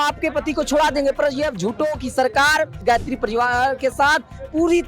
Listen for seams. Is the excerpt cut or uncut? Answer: cut